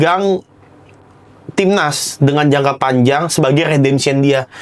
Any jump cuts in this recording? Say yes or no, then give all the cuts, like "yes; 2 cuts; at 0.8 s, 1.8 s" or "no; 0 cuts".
no; 0 cuts